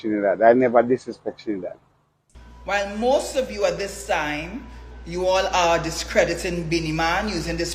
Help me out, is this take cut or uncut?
cut